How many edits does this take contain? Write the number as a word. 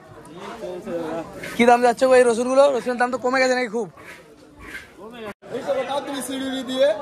one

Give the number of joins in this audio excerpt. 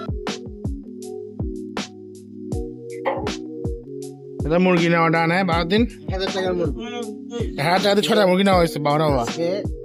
zero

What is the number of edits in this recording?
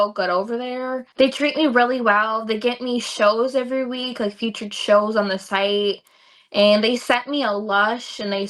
one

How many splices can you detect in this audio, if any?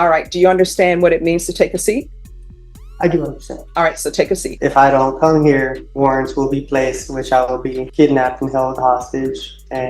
three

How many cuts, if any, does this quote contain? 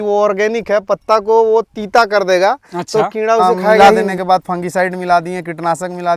one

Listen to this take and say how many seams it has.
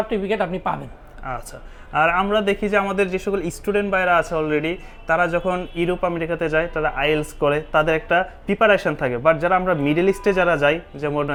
zero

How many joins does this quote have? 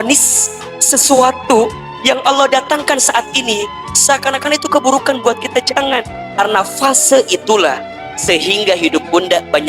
two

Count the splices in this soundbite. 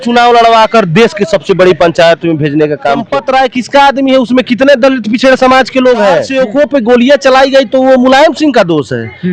two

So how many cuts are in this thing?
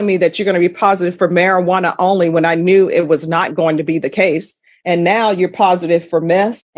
zero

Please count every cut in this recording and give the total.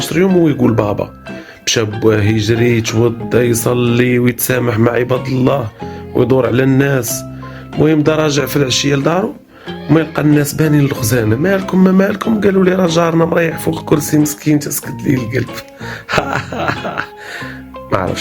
one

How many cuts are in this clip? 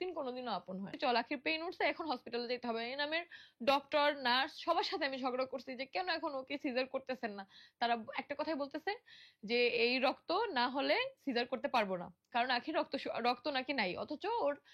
one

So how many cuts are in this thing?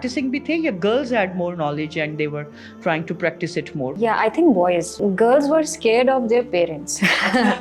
two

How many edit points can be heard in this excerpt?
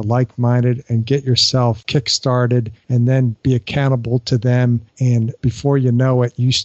three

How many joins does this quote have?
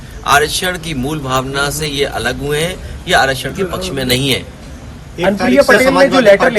zero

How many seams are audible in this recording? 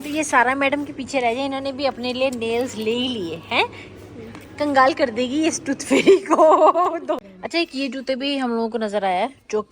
one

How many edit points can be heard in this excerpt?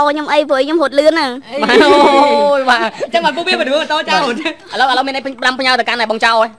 zero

